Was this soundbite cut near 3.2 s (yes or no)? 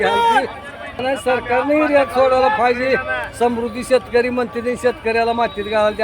no